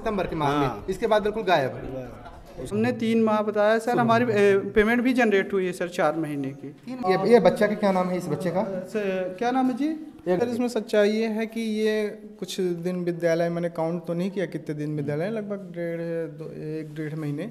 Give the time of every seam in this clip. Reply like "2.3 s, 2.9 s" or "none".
2.5 s, 7.0 s, 10.4 s